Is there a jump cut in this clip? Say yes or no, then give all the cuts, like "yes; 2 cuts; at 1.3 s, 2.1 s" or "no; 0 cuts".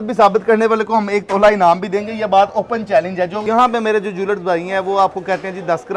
yes; 1 cut; at 3.4 s